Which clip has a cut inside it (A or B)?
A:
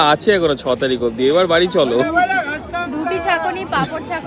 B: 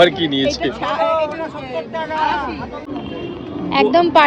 B